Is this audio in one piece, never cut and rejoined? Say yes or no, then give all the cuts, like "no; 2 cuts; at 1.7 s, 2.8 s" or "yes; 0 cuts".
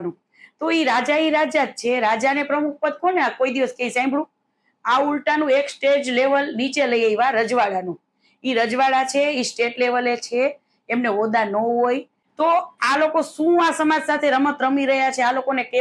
no; 1 cut; at 12.2 s